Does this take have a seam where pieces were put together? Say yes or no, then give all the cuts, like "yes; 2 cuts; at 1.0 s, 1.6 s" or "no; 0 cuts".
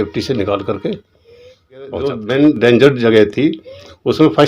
yes; 1 cut; at 2.0 s